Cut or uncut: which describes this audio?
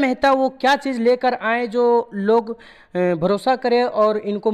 uncut